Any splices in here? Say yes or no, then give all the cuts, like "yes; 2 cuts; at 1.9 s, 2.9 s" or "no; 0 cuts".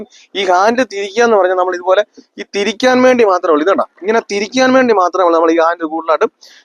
no; 0 cuts